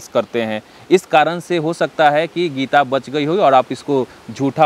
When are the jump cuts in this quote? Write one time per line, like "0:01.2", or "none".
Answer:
none